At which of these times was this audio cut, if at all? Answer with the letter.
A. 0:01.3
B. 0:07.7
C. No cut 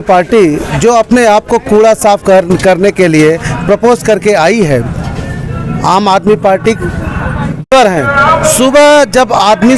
B